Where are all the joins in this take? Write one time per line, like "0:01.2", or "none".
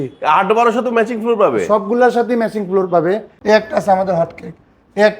0:03.3